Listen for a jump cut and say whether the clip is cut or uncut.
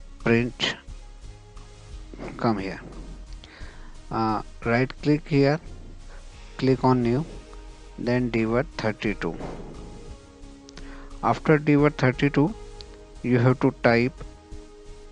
cut